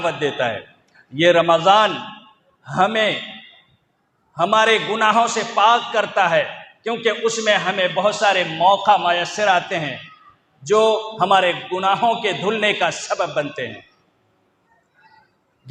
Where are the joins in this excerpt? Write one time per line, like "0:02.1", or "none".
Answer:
none